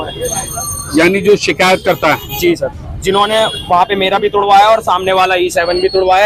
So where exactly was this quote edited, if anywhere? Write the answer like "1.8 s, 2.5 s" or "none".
none